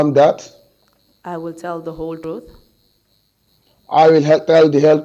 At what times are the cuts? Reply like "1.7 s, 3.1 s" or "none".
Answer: 2.2 s